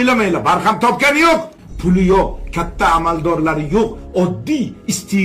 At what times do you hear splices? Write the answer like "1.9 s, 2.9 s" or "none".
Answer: 1.6 s